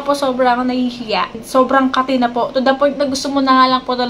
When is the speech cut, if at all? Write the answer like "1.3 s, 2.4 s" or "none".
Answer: 1.3 s

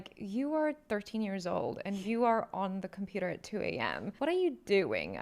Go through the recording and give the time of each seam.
none

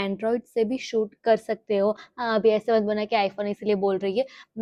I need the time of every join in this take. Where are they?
none

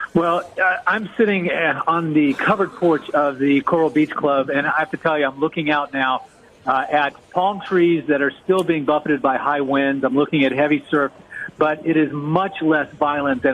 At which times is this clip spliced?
2.5 s

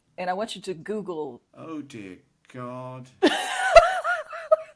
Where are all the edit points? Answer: 1.4 s

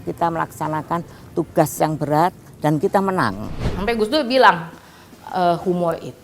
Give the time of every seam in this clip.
3.7 s

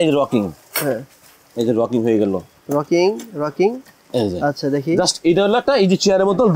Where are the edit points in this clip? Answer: none

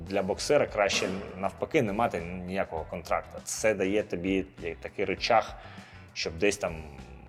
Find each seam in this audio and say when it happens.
none

